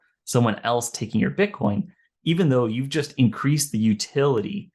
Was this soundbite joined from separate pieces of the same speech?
no; 0 cuts

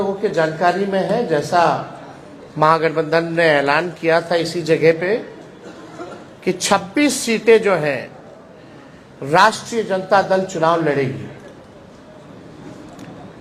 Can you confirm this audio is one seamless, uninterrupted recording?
yes; 0 cuts

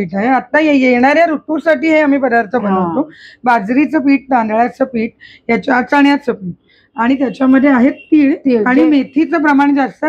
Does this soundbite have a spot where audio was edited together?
no; 0 cuts

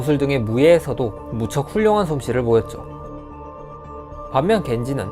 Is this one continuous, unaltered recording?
no; 1 cut; at 1.5 s

